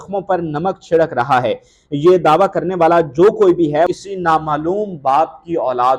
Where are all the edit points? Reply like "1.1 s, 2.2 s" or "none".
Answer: 3.9 s